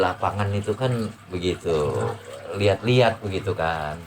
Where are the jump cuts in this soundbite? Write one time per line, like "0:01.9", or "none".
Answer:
0:01.2